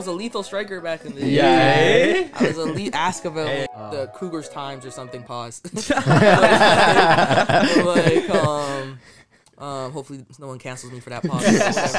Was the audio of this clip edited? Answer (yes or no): yes